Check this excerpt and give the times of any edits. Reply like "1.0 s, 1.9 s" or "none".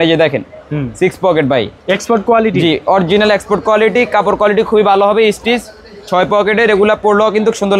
none